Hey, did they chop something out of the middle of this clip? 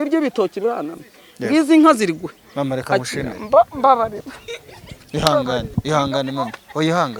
no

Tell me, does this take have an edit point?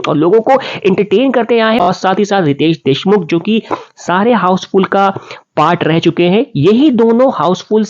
yes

